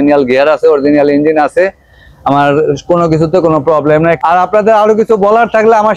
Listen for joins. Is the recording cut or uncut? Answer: cut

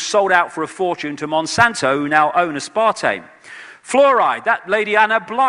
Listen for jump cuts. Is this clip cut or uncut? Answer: uncut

